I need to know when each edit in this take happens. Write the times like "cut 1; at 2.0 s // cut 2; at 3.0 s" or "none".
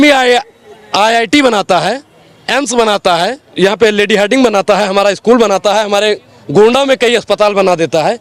cut 1; at 3.4 s